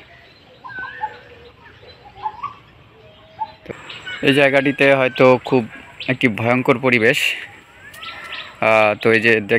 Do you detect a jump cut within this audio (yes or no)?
yes